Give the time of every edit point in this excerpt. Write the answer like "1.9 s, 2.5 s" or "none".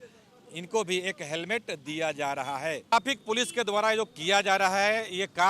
2.9 s